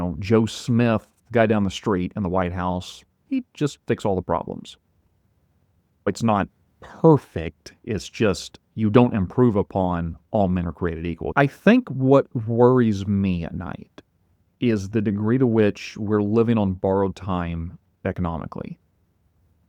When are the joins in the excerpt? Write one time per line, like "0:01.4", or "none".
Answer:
0:06.1
0:11.2